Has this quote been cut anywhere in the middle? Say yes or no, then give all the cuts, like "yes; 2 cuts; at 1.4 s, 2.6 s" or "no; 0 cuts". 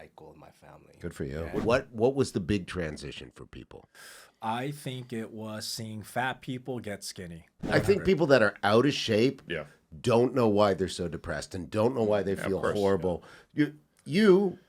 yes; 2 cuts; at 1.6 s, 7.7 s